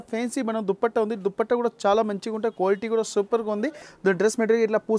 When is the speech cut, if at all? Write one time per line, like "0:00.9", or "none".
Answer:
0:03.9